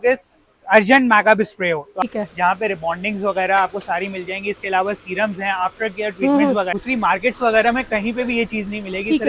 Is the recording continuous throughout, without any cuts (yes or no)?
no